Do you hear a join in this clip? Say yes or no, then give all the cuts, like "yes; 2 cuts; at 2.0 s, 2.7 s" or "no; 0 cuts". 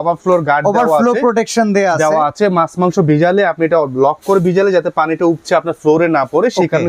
no; 0 cuts